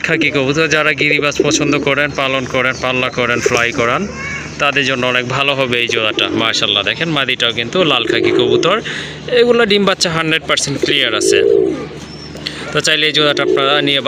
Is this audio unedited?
yes; 0 cuts

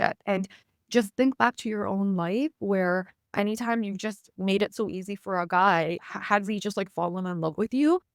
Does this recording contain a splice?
no; 0 cuts

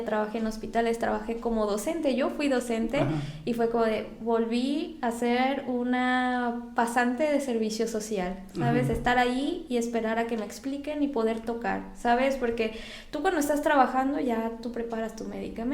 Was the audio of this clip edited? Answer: no; 0 cuts

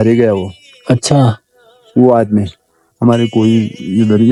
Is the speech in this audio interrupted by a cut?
no; 0 cuts

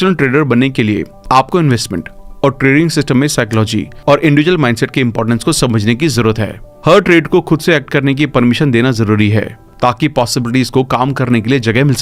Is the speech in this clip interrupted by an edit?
no; 0 cuts

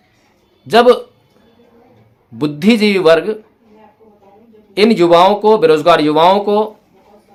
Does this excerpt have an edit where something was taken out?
no; 0 cuts

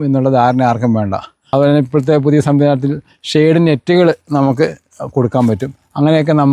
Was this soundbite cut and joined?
yes; 1 cut; at 1.4 s

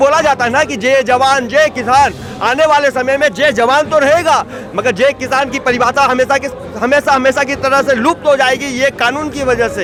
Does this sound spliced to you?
no; 0 cuts

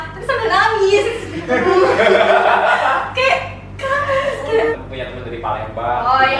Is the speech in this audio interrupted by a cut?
yes; 1 cut; at 4.7 s

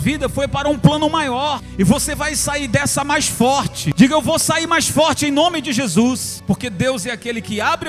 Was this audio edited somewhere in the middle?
yes; 3 cuts; at 1.7 s, 3.8 s, 6.3 s

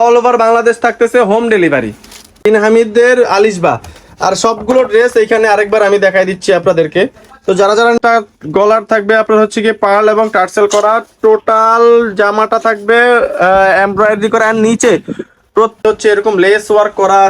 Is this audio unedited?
no; 3 cuts; at 2.4 s, 8.0 s, 15.8 s

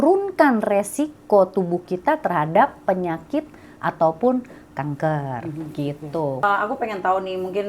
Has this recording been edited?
yes; 1 cut; at 6.4 s

